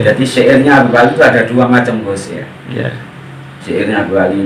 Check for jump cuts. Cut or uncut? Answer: uncut